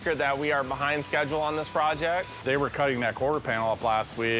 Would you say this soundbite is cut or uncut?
cut